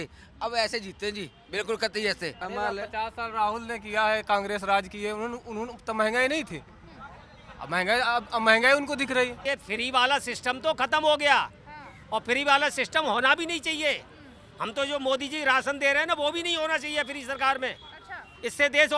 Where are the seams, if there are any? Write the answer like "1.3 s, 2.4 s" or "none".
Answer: 2.4 s, 9.4 s